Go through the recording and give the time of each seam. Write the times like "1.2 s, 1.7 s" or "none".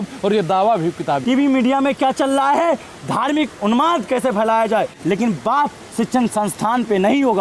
1.2 s, 4.9 s